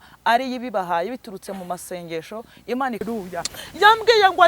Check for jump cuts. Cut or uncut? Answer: cut